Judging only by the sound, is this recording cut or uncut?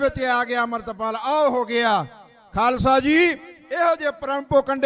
uncut